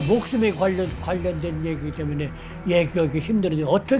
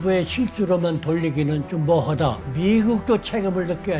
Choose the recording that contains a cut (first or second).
second